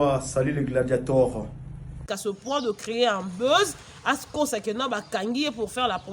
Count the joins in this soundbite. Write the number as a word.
two